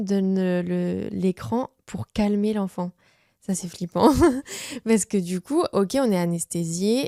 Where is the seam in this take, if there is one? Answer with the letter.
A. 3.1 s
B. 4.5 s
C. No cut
C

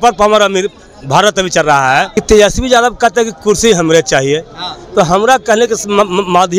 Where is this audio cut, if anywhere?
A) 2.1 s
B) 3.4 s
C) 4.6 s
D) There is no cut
A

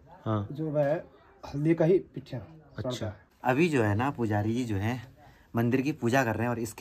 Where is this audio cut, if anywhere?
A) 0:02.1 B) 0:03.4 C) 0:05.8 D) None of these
B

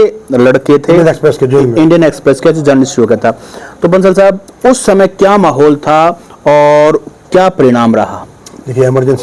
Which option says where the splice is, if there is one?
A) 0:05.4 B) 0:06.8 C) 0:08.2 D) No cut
D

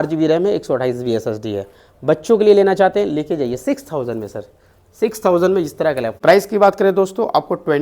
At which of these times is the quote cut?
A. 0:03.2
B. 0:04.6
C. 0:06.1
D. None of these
C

